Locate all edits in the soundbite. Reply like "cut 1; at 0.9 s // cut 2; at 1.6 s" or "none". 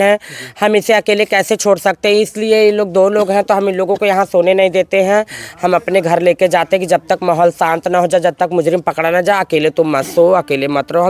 none